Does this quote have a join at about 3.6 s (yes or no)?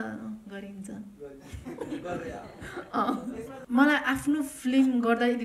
yes